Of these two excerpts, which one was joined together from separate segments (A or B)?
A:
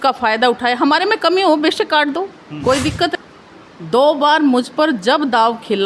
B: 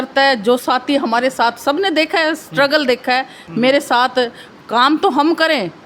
A